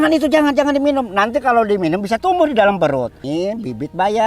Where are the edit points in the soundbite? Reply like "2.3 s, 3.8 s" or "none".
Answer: 3.2 s